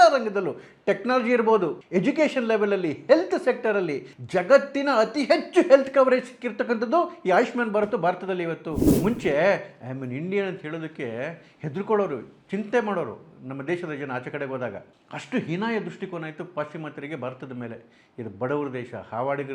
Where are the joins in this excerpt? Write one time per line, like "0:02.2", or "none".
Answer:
0:01.8
0:08.9